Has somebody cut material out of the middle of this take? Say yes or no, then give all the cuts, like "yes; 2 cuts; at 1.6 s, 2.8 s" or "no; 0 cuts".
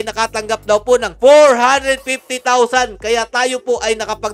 no; 0 cuts